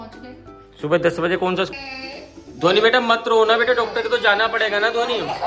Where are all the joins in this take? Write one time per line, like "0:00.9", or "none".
0:01.7